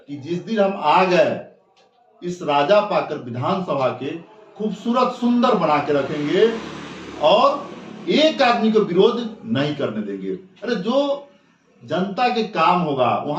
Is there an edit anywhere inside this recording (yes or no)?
no